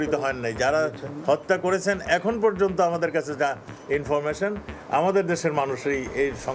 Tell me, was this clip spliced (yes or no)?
no